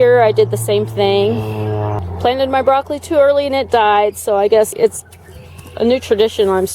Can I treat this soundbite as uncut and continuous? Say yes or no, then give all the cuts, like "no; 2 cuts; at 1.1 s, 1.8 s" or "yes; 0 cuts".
no; 2 cuts; at 2.0 s, 4.7 s